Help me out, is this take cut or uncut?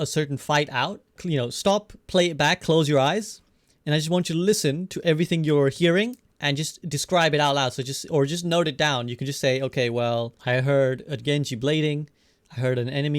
cut